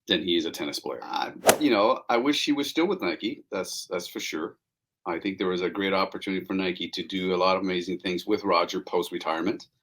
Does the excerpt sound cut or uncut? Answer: cut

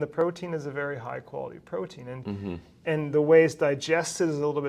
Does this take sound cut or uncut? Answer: uncut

